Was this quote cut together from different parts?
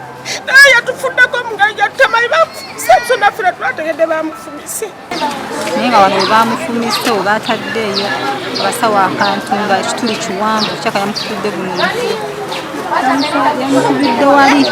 yes; 1 cut; at 5.1 s

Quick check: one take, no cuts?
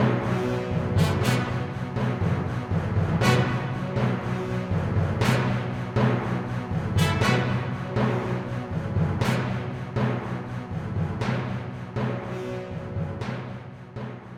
yes; 0 cuts

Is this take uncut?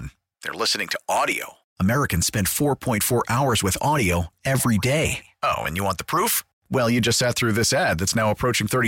yes; 0 cuts

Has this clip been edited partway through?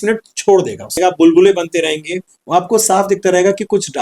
yes; 1 cut; at 1.0 s

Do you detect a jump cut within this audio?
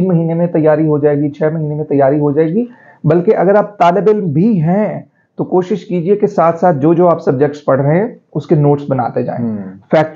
no; 0 cuts

